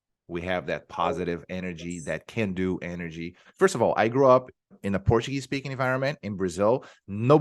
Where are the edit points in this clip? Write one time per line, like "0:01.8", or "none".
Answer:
0:03.3